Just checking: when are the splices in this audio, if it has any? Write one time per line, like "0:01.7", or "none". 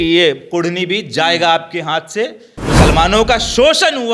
0:02.5